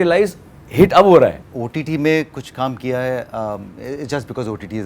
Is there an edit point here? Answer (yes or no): yes